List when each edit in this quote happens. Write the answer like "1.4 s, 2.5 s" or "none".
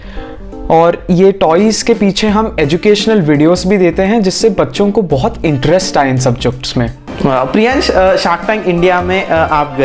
7.0 s